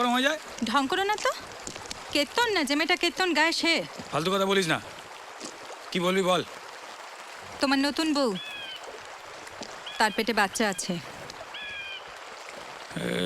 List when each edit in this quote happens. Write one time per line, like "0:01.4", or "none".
none